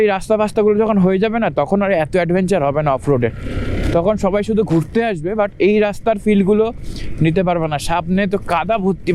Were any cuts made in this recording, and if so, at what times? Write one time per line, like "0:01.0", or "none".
none